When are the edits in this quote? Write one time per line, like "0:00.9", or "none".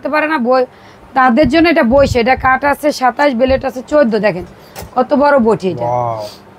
none